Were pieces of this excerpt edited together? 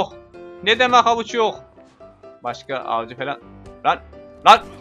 yes; 1 cut; at 2.2 s

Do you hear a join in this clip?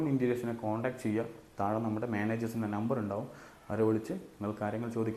no; 0 cuts

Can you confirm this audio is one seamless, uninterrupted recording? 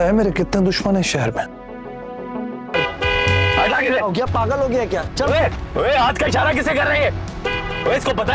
no; 1 cut; at 2.7 s

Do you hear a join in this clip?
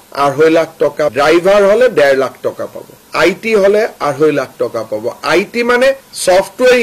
yes; 1 cut; at 1.1 s

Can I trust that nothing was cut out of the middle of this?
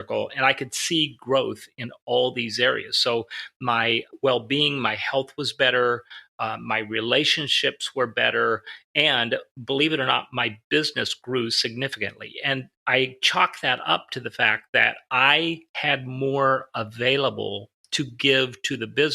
no; 2 cuts; at 4.1 s, 12.8 s

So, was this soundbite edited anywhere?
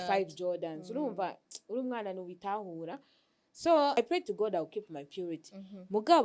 yes; 1 cut; at 4.0 s

